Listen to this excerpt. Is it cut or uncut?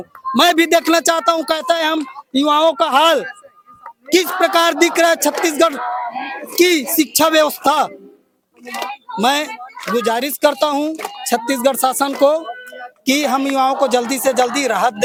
uncut